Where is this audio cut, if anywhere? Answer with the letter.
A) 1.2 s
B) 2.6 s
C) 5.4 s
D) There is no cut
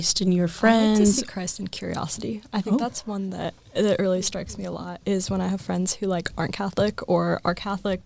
A